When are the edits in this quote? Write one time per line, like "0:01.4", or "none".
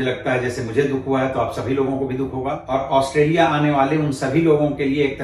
0:02.6